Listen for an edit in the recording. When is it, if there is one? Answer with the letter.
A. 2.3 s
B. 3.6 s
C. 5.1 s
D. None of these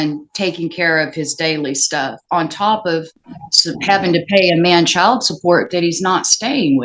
D